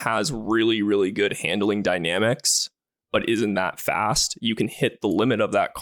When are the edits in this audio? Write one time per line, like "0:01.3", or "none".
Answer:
none